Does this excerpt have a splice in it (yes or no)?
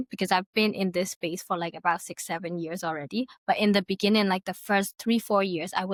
no